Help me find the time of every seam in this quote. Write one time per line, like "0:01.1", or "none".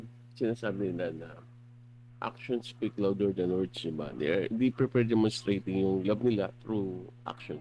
none